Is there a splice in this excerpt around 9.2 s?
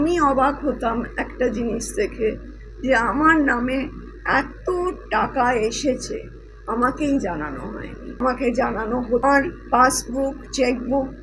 yes; 2 cuts; at 8.2 s, 9.2 s

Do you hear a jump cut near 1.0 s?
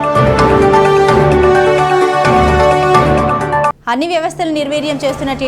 yes; 1 cut; at 1.0 s

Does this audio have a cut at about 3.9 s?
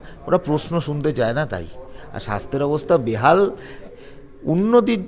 yes; 1 cut; at 3.9 s

